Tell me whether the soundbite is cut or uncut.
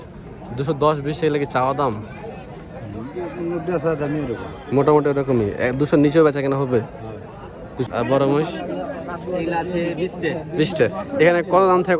cut